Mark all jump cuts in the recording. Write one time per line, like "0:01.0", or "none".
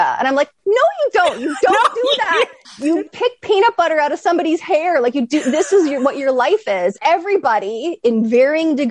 0:02.6
0:07.0
0:08.0